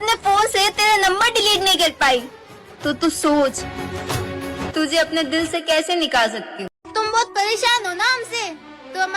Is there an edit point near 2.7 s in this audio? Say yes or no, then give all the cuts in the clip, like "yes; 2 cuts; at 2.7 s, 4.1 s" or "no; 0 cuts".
no; 1 cut; at 6.8 s